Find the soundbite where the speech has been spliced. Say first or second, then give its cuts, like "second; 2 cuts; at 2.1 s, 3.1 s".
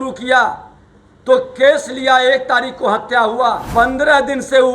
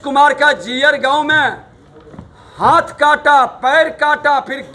first; 1 cut; at 3.6 s